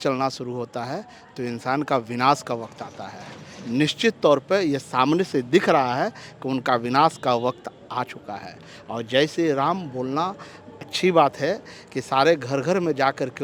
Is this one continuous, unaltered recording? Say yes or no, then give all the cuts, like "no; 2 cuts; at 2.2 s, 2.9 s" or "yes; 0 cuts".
yes; 0 cuts